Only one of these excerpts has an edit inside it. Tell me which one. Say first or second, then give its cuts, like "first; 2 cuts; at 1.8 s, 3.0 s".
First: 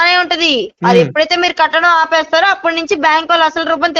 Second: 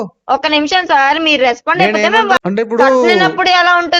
second; 1 cut; at 2.4 s